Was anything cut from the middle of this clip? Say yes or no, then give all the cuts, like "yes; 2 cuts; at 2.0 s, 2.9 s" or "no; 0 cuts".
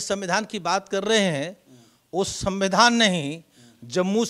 no; 0 cuts